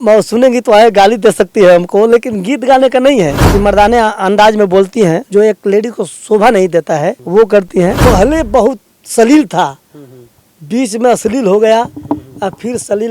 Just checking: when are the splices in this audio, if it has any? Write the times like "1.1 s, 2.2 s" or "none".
3.4 s, 8.0 s